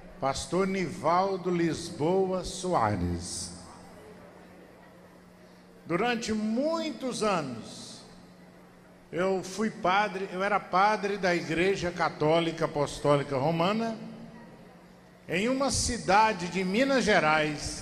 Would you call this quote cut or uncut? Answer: uncut